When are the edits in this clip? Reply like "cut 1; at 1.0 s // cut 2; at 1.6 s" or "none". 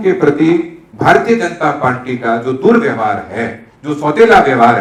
none

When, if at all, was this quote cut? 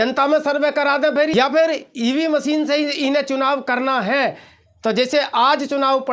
cut 1; at 1.3 s

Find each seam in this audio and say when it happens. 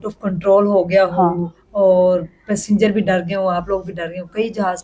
none

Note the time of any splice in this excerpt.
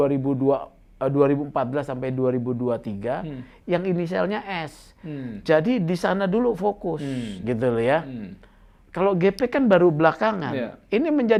none

